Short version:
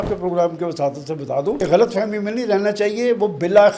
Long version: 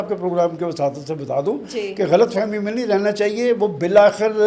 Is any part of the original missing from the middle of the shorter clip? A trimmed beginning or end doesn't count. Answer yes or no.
yes